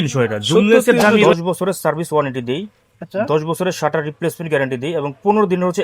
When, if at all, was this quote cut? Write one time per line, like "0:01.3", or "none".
0:01.3